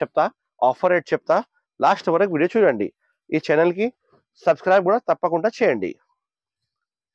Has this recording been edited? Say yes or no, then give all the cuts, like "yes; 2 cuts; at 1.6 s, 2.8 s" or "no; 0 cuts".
no; 0 cuts